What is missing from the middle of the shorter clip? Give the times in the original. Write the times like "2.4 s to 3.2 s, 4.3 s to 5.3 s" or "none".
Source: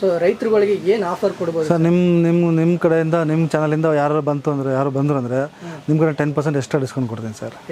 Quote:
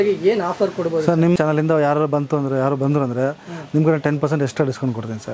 2.0 s to 3.5 s